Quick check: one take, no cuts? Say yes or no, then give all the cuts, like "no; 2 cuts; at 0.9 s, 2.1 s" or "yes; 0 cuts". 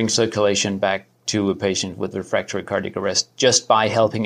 yes; 0 cuts